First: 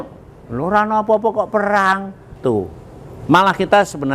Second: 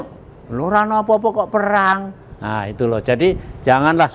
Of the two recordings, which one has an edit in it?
first; 1 cut; at 2.3 s

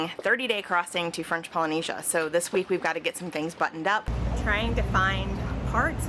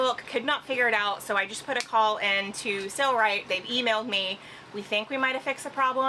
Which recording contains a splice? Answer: first; 1 cut; at 4.1 s

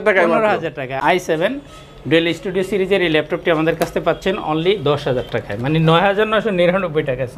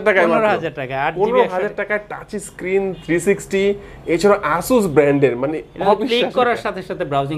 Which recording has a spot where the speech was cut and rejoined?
first; 1 cut; at 0.9 s

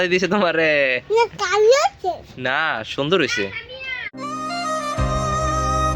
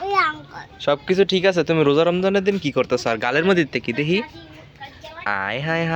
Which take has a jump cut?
first; 1 cut; at 4.1 s

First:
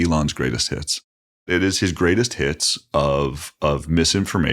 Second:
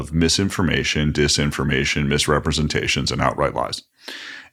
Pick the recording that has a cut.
first; 1 cut; at 1.4 s

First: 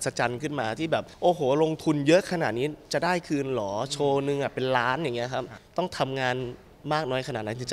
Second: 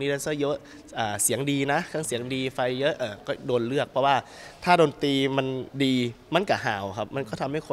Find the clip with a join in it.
first; 2 cuts; at 1.1 s, 5.6 s

